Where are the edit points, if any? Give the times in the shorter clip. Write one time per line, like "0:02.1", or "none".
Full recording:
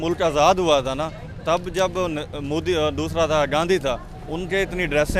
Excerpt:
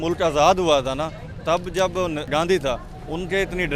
0:02.3